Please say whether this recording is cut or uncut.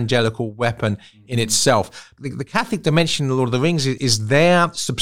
cut